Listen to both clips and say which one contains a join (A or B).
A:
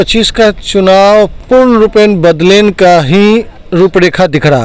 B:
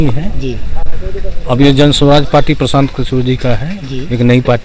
A